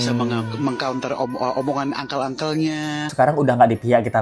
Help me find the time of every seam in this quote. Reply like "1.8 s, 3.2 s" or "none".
3.1 s